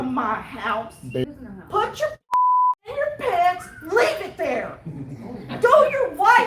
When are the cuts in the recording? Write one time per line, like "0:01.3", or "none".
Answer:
0:01.2